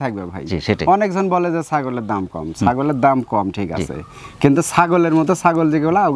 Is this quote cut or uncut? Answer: uncut